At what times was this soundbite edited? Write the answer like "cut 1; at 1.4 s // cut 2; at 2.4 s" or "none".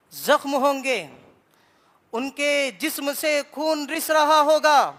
none